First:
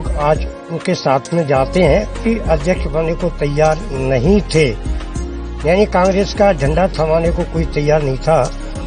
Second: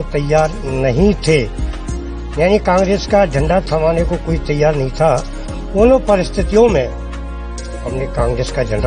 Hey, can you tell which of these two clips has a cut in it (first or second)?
first